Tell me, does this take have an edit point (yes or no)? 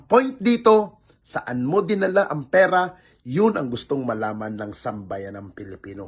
no